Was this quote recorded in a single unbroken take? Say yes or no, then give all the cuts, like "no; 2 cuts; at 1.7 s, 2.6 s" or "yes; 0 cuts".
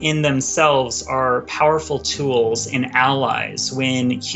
yes; 0 cuts